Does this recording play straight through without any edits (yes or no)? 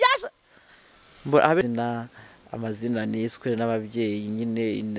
no